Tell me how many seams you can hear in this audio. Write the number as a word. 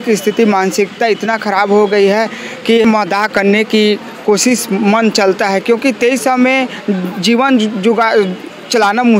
zero